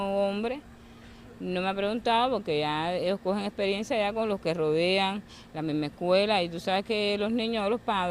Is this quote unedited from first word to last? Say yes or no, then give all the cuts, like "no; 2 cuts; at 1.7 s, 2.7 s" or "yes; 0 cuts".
yes; 0 cuts